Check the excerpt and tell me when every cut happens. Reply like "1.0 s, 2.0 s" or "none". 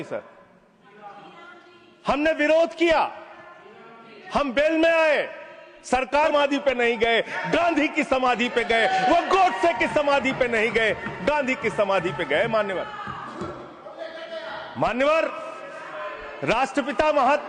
6.3 s